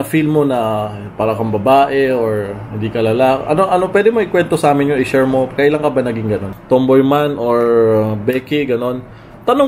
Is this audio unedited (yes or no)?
no